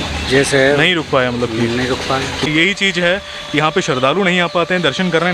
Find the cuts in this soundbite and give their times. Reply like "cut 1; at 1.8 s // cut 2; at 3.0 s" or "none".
cut 1; at 2.5 s